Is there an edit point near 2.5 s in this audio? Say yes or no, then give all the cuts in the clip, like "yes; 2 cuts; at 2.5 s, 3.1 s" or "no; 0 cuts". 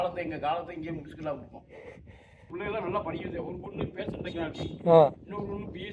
yes; 1 cut; at 2.5 s